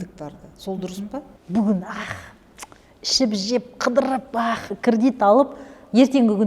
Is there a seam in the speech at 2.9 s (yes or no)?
no